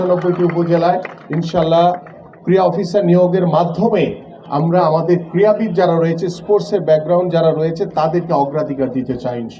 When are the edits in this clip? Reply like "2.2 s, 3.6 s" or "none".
none